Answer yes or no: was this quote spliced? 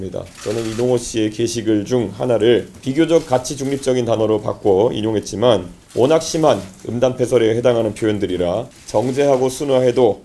yes